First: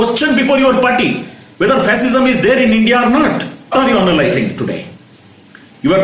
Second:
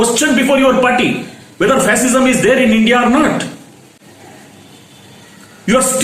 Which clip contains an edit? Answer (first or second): first